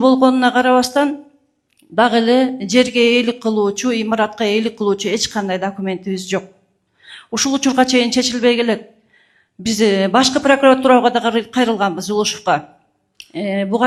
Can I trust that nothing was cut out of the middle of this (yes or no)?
yes